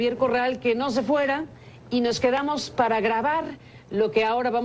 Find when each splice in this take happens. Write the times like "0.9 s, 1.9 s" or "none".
2.3 s